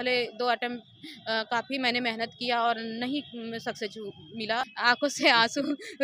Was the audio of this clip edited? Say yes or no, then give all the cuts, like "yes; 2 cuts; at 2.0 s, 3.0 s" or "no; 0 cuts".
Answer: yes; 1 cut; at 4.7 s